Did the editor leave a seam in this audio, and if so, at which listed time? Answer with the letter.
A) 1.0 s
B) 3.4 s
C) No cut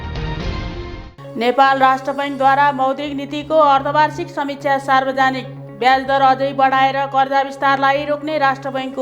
A